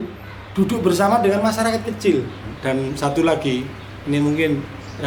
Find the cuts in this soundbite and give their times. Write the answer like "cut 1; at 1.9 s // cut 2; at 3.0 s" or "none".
cut 1; at 2.5 s